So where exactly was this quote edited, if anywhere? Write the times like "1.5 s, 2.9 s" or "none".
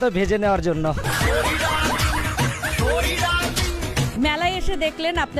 4.2 s